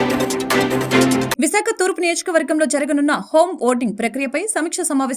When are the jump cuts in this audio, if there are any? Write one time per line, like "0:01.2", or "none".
0:01.3